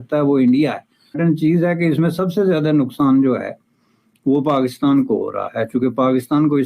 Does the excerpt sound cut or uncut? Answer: cut